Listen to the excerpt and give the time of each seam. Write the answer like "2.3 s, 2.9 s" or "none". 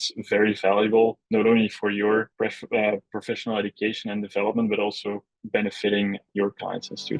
2.3 s, 5.3 s, 6.3 s